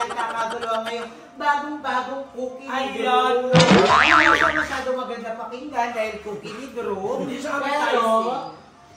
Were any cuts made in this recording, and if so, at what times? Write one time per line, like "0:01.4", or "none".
none